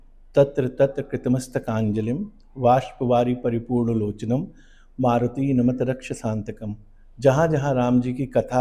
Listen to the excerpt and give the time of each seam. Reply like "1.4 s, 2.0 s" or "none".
none